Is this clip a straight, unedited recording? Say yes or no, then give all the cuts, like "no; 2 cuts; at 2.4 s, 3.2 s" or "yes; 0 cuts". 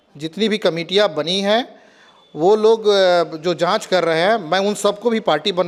yes; 0 cuts